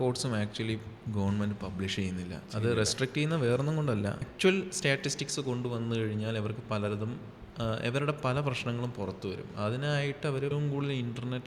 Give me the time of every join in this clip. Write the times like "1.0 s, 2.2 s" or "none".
4.3 s, 10.5 s

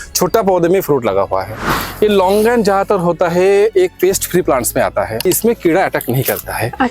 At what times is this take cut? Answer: 1.5 s, 5.3 s

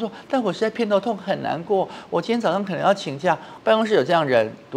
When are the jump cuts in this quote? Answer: 3.5 s

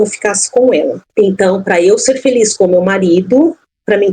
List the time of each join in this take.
1.0 s

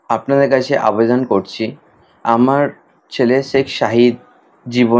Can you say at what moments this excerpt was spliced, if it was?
none

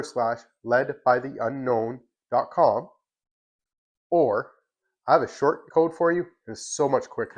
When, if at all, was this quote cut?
5.6 s

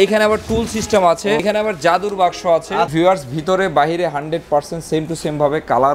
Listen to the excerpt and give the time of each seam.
1.4 s, 2.9 s

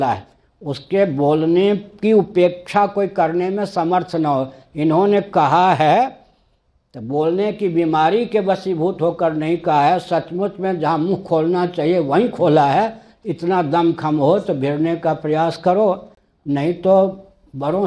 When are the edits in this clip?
none

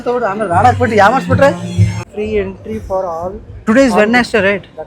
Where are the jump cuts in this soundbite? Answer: 1.9 s

